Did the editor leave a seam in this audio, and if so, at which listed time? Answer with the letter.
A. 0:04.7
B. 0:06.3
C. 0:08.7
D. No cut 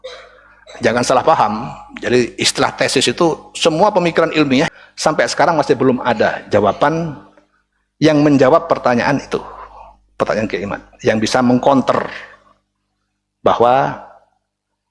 A